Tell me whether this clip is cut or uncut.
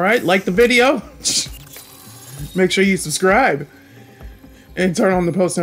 uncut